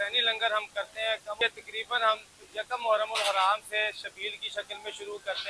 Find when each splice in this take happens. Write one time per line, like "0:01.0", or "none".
0:01.4